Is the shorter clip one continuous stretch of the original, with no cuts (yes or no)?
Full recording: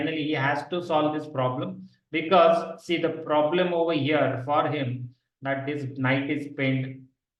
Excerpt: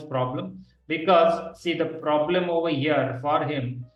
yes